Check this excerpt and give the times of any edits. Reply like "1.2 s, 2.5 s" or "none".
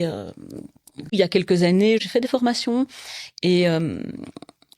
1.1 s, 2.1 s